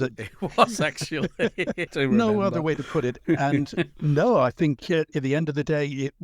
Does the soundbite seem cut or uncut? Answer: cut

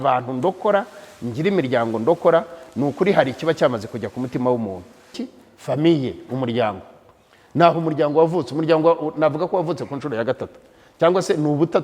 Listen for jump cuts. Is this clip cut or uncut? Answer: cut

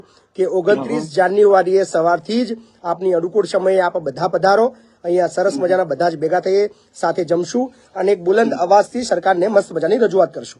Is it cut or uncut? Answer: uncut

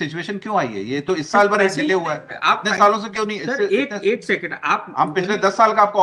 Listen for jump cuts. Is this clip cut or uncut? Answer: uncut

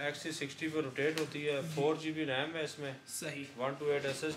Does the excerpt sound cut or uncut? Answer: uncut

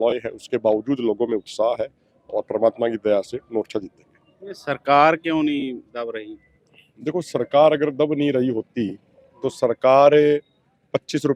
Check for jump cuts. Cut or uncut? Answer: uncut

